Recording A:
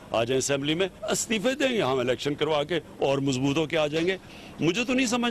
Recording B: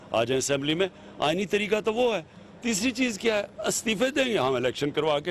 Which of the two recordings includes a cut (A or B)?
A